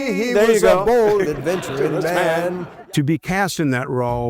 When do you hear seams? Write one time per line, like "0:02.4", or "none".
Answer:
0:02.8